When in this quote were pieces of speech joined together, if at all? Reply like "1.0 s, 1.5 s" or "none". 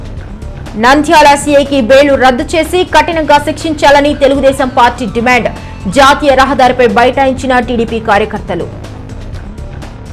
0.7 s, 8.7 s